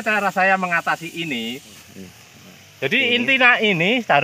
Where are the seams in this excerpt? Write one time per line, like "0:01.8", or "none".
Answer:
0:01.9